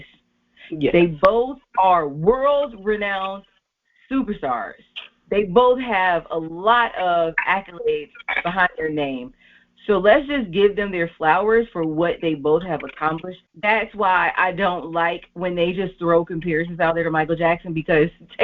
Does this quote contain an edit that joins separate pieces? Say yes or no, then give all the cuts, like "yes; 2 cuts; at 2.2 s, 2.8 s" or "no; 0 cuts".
yes; 1 cut; at 13.5 s